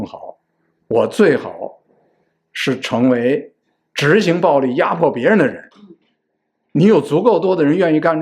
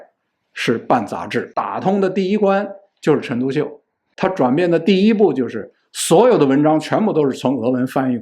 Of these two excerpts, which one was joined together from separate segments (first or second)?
second